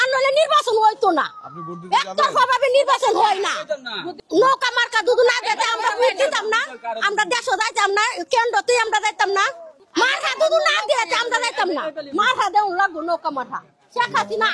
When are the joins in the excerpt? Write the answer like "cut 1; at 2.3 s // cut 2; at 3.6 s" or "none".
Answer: none